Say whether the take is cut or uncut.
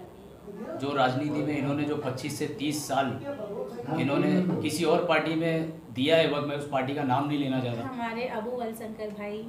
cut